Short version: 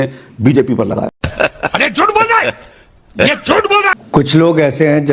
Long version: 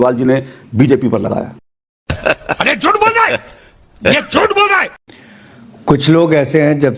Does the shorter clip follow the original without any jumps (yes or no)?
no